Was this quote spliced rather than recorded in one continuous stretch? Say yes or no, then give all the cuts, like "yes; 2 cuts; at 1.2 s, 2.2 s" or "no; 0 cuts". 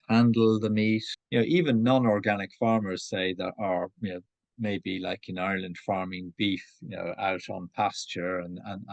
yes; 1 cut; at 1.2 s